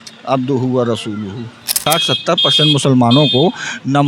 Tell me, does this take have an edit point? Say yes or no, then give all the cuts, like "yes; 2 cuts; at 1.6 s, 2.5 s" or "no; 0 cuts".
yes; 1 cut; at 1.8 s